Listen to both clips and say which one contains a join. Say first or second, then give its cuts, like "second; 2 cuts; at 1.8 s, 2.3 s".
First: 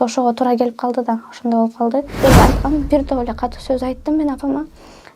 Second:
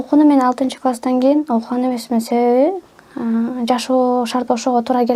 first; 1 cut; at 2.2 s